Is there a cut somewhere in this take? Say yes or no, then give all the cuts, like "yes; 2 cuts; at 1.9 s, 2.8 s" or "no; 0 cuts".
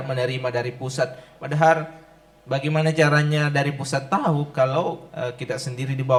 no; 0 cuts